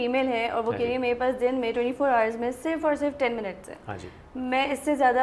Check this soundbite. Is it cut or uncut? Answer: uncut